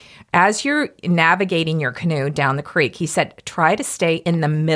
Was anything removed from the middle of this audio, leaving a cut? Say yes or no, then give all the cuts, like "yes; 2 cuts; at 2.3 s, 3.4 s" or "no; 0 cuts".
no; 0 cuts